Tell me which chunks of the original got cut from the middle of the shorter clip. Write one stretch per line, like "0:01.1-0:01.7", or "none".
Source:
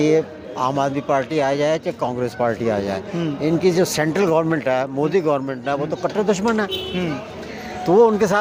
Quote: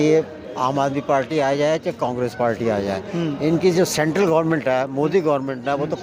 none

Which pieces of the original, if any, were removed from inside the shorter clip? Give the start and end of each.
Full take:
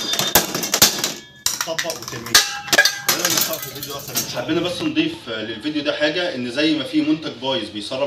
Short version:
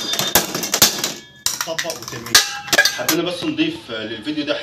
0:02.9-0:04.3

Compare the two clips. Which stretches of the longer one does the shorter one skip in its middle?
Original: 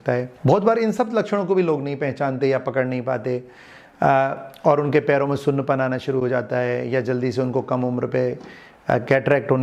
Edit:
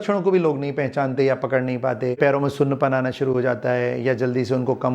0:03.4-0:05.0

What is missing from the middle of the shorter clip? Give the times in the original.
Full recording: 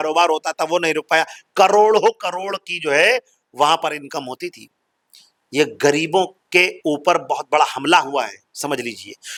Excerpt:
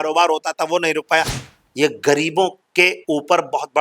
0:01.4-0:05.2

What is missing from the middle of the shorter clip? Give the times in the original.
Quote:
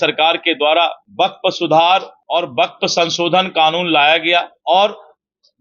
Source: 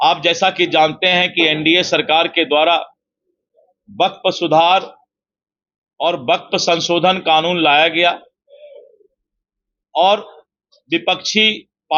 0:02.9-0:03.8
0:05.0-0:05.9
0:08.2-0:09.8

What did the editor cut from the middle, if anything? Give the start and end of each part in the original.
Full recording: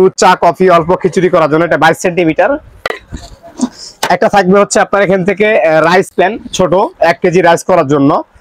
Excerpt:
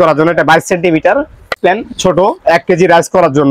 0:02.9-0:06.1

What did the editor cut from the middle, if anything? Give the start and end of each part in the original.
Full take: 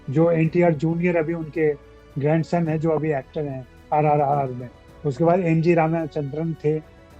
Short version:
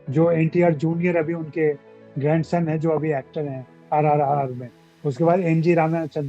none

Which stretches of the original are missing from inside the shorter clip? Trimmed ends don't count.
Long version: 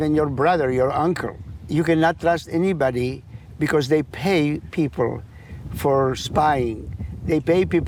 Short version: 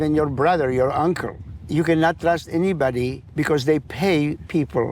0:03.2-0:03.4

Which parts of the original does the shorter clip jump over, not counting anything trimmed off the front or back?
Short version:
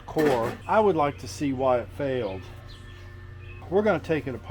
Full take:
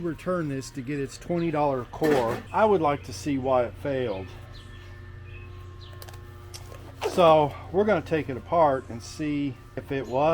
0:05.4-0:07.6

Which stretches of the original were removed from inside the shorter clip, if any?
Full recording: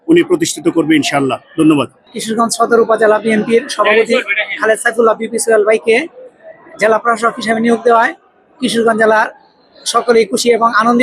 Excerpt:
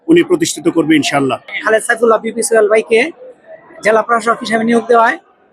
0:01.4-0:04.4

